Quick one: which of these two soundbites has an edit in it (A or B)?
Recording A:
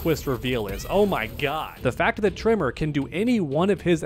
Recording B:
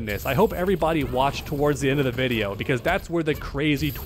A